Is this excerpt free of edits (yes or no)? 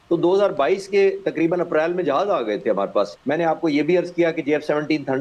no